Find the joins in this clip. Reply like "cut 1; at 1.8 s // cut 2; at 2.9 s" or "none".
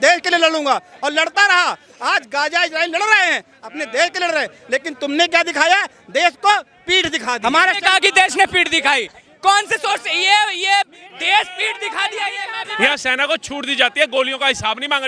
cut 1; at 7.4 s // cut 2; at 12.7 s